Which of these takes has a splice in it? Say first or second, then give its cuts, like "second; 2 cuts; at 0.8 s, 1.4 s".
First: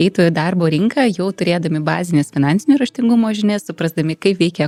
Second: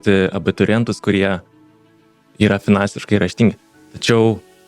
second; 1 cut; at 1.9 s